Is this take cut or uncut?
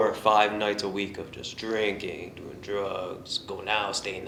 uncut